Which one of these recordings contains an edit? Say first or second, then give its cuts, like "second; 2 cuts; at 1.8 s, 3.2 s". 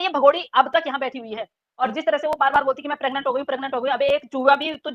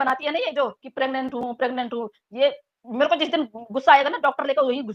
first; 1 cut; at 1.6 s